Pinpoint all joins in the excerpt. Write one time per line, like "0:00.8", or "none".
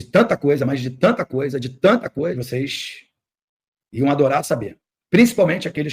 0:02.3